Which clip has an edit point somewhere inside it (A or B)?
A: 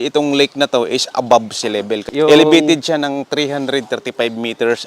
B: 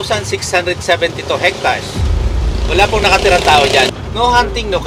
A